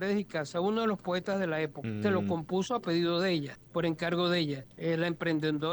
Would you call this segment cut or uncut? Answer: cut